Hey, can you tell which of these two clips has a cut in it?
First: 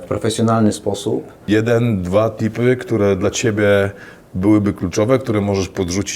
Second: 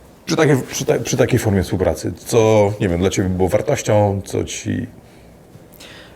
first; 1 cut; at 1.4 s

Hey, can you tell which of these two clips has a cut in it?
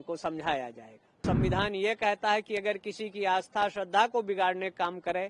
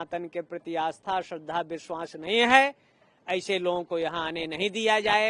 first; 1 cut; at 1.2 s

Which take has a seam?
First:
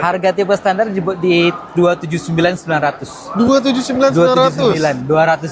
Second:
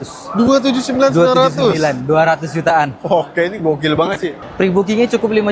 second; 1 cut; at 4.4 s

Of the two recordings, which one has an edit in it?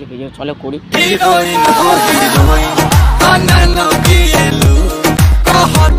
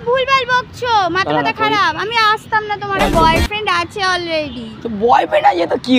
second; 1 cut; at 3.0 s

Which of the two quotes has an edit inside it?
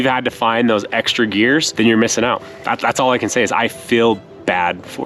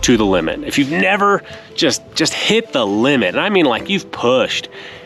first; 1 cut; at 1.7 s

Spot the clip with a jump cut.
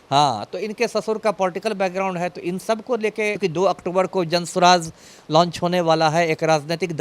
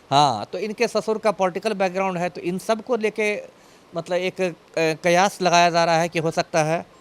first; 1 cut; at 3.4 s

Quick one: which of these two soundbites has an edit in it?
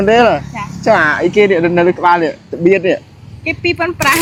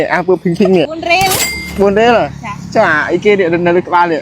second; 1 cut; at 1.0 s

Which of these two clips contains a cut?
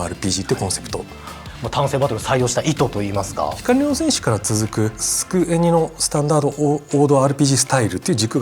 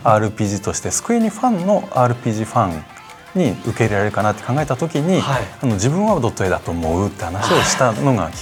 first; 3 cuts; at 1.5 s, 3.6 s, 5.1 s

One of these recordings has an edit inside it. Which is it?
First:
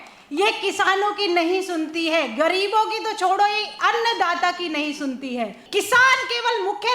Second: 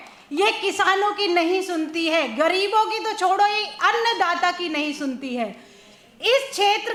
first; 1 cut; at 5.6 s

